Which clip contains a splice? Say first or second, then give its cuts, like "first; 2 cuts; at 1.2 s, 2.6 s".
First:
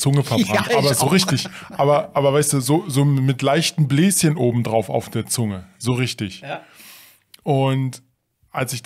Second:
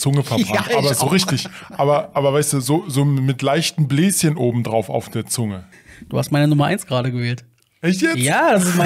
second; 1 cut; at 5.7 s